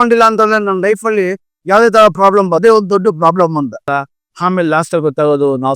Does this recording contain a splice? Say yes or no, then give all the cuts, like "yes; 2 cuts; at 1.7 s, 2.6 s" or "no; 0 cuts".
yes; 2 cuts; at 2.6 s, 3.9 s